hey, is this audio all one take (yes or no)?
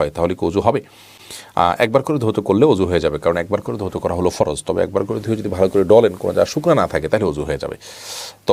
yes